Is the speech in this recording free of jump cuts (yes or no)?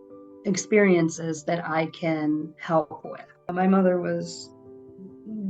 no